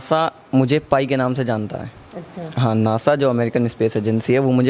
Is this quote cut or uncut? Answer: uncut